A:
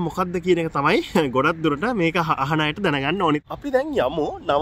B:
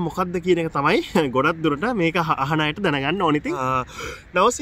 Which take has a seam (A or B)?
A